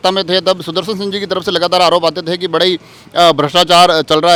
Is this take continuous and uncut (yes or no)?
yes